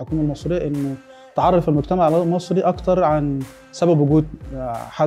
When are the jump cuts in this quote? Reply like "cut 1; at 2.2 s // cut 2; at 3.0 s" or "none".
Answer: none